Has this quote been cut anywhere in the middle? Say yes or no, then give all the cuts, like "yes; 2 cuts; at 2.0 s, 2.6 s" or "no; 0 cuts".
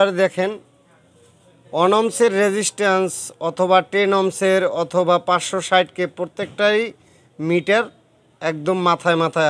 no; 0 cuts